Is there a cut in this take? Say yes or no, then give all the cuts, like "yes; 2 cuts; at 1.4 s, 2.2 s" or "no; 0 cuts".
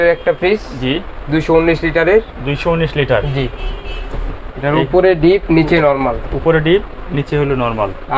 no; 0 cuts